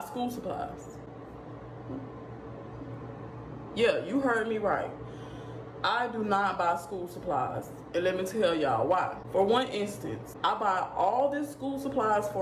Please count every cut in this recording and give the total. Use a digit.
0